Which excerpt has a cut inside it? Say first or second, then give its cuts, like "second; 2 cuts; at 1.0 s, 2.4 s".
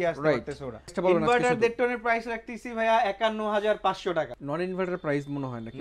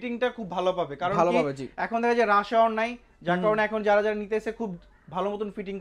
first; 2 cuts; at 0.9 s, 4.4 s